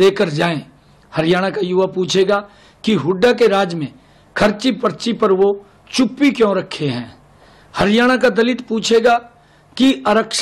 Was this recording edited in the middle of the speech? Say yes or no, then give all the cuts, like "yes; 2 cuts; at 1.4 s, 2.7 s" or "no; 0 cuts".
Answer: no; 0 cuts